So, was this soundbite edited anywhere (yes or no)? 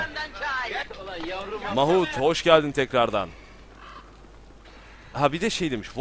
no